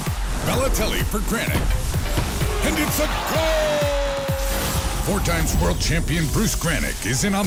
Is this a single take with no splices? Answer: yes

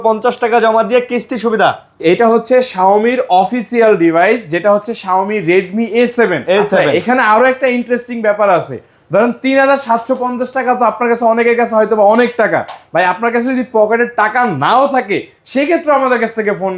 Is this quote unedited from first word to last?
yes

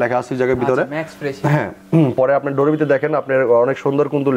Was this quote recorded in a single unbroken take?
yes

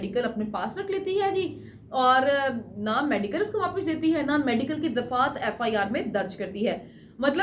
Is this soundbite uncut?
yes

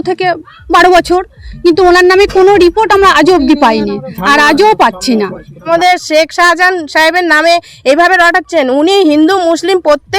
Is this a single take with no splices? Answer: no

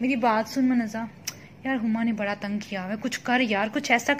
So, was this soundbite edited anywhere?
no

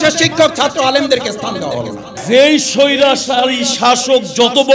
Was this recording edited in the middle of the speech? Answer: yes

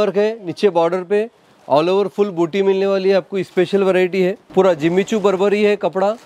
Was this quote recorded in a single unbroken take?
no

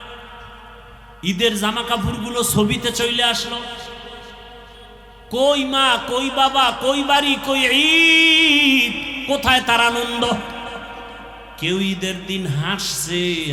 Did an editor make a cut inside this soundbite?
no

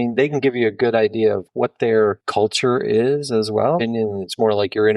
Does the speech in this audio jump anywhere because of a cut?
yes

